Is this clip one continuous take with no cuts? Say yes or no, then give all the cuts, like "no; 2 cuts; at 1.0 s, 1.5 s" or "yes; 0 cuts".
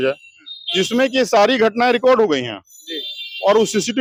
yes; 0 cuts